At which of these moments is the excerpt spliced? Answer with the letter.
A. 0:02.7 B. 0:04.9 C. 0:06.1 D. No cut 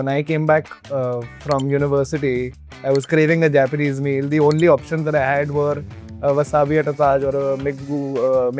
D